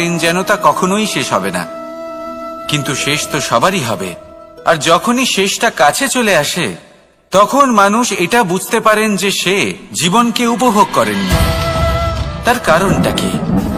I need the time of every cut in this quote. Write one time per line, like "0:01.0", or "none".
0:12.9